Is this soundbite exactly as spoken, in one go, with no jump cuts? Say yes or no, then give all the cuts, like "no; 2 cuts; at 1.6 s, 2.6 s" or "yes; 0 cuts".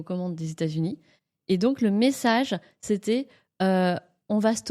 yes; 0 cuts